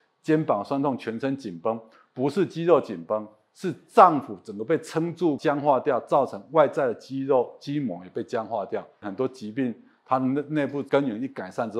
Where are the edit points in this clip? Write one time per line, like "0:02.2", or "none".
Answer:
0:05.4
0:09.1
0:10.8